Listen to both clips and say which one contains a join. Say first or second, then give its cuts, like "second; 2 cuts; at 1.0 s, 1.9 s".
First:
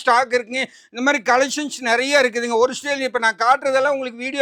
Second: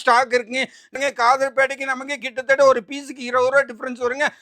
second; 1 cut; at 1.0 s